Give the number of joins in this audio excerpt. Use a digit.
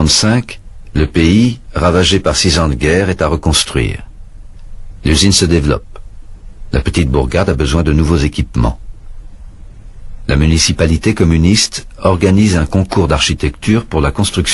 1